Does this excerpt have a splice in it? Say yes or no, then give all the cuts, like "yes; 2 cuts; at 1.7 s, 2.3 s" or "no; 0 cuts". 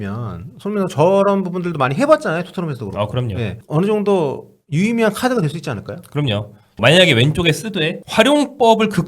yes; 1 cut; at 6.7 s